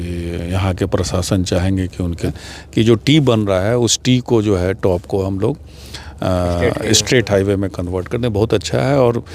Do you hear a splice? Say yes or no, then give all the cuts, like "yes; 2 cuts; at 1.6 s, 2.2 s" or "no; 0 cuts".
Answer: yes; 1 cut; at 2.3 s